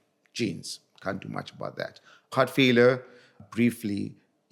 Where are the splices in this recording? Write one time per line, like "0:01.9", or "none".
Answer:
0:02.3
0:03.4